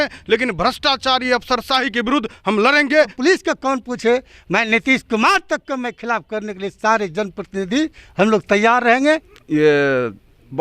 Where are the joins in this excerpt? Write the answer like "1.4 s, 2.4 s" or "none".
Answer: 3.1 s, 9.3 s